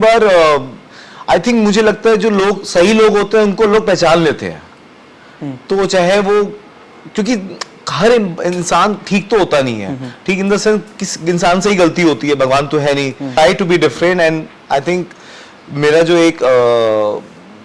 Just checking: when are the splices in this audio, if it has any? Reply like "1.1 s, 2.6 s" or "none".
13.3 s

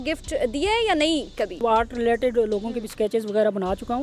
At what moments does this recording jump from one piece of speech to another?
1.6 s

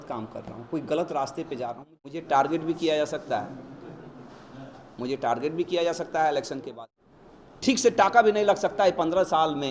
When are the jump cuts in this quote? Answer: 1.8 s, 6.7 s

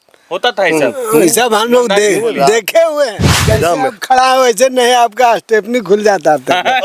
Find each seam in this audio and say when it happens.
3.3 s

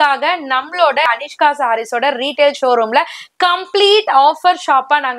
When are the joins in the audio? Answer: 1.1 s

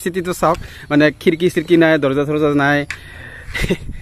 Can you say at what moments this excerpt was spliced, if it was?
none

